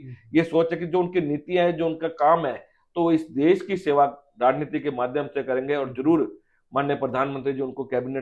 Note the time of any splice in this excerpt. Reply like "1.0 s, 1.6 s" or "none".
none